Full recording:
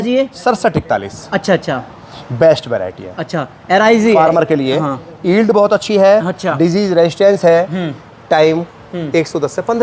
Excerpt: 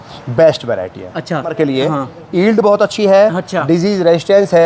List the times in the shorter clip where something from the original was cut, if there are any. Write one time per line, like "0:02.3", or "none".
0:01.5